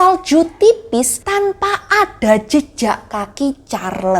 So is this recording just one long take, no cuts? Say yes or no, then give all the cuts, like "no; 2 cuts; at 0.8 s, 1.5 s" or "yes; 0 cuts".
no; 1 cut; at 1.2 s